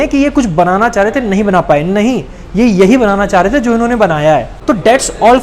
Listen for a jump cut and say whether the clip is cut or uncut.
uncut